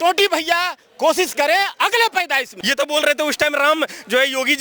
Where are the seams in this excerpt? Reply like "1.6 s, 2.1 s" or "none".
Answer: 2.4 s